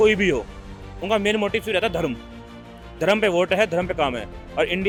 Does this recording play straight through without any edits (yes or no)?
yes